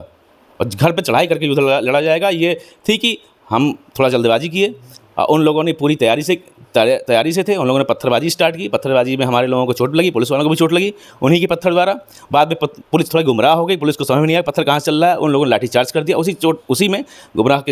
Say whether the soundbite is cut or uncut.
uncut